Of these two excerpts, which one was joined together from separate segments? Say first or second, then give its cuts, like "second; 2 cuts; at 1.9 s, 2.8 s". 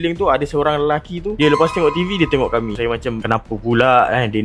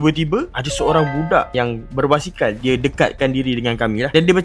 first; 1 cut; at 2.8 s